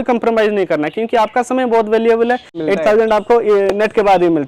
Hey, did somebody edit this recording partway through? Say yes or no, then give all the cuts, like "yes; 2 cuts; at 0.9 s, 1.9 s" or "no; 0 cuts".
yes; 1 cut; at 2.5 s